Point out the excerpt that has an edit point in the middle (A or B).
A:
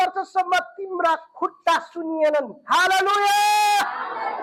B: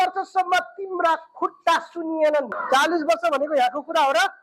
B